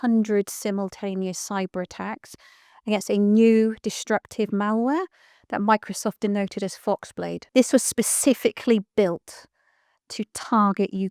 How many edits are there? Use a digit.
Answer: 1